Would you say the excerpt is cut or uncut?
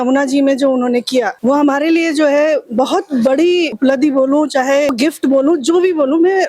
cut